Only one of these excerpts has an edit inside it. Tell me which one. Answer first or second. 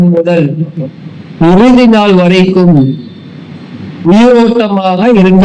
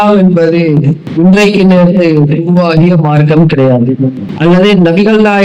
second